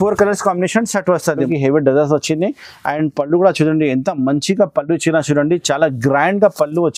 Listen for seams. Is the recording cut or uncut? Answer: cut